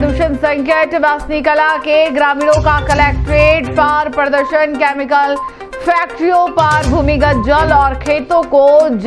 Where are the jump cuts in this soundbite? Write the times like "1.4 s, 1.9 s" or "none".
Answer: none